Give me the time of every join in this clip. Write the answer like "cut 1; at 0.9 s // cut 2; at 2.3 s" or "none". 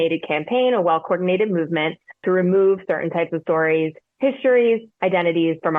none